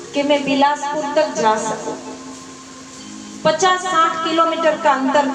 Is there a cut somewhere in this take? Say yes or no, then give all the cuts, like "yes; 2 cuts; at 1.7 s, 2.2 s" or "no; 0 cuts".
no; 0 cuts